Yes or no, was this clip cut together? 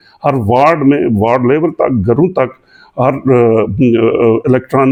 no